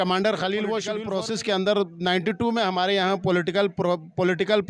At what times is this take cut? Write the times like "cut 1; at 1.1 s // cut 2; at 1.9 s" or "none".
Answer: cut 1; at 1.0 s